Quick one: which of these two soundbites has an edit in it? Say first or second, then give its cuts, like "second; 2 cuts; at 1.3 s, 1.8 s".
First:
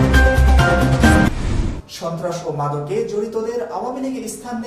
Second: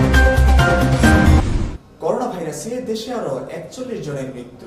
first; 1 cut; at 1.2 s